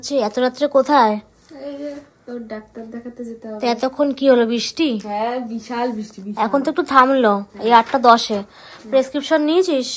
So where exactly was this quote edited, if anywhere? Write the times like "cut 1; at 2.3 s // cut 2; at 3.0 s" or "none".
none